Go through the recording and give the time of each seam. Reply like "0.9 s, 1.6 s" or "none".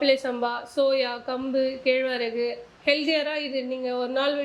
2.6 s